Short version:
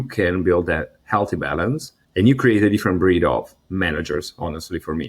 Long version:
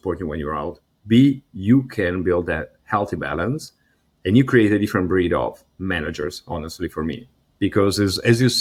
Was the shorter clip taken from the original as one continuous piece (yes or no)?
no